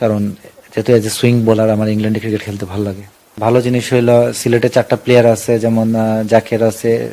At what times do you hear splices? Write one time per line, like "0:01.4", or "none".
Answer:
0:03.2